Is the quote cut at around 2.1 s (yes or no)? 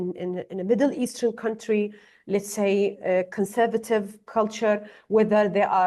no